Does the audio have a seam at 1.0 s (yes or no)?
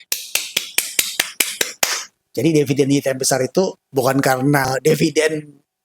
no